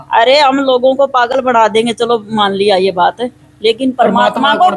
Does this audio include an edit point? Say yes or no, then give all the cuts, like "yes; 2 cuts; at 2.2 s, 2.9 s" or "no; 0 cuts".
no; 0 cuts